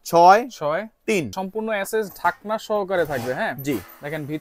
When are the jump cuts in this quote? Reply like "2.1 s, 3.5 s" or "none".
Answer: 1.3 s